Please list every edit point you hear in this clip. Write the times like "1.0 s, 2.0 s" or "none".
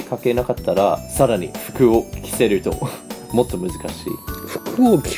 1.1 s